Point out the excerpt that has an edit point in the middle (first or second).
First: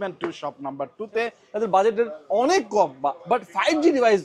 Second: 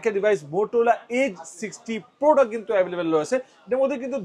first